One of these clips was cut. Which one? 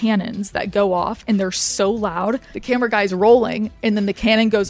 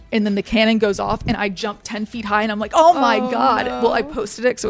first; 1 cut; at 2.5 s

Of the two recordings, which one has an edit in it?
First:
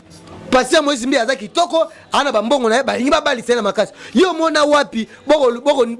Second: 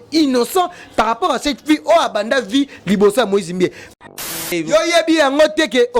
second; 1 cut; at 4.0 s

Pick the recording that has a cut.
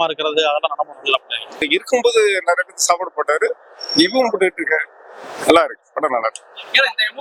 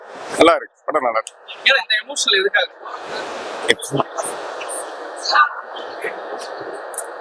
first; 1 cut; at 1.7 s

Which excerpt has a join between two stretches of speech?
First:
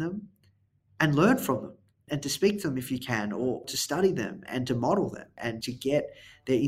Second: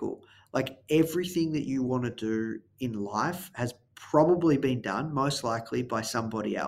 first; 4 cuts; at 2.0 s, 3.7 s, 4.4 s, 5.4 s

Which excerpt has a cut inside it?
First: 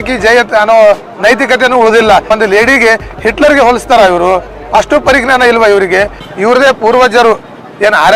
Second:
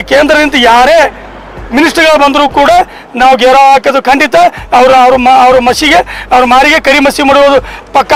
first; 2 cuts; at 2.3 s, 6.2 s

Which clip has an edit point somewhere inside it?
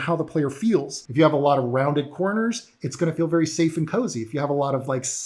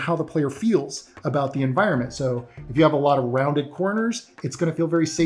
first; 1 cut; at 1.0 s

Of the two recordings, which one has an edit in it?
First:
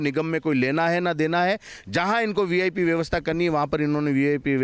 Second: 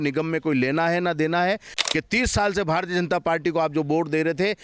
second; 1 cut; at 1.8 s

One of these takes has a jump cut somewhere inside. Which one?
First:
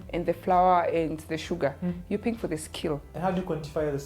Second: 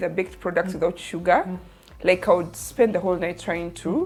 first; 1 cut; at 3.1 s

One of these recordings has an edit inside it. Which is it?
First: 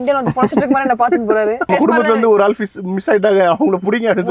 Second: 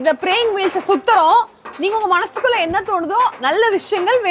first; 1 cut; at 1.7 s

